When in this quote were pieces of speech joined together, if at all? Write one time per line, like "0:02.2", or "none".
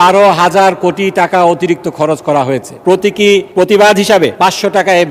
0:02.7
0:03.5
0:04.3